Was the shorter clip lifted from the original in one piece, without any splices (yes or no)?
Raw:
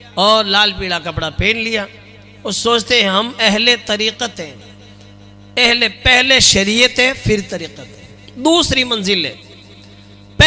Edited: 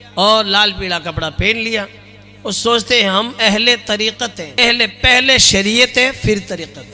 no